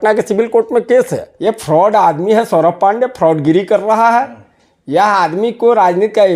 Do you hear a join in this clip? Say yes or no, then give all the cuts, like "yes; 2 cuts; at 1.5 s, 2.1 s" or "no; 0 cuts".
yes; 1 cut; at 1.2 s